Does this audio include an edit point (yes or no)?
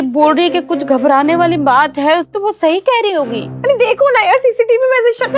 yes